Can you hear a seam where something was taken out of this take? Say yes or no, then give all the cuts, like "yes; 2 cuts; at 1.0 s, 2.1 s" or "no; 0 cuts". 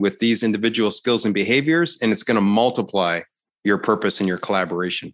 no; 0 cuts